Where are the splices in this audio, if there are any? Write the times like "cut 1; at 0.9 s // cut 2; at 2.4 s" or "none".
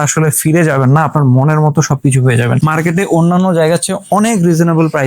cut 1; at 2.6 s